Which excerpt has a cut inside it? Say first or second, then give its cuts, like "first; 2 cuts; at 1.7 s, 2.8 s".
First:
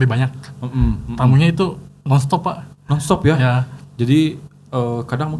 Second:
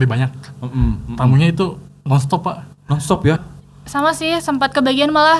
second; 1 cut; at 3.4 s